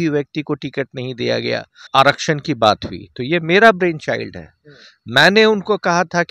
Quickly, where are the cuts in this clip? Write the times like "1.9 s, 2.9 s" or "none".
1.8 s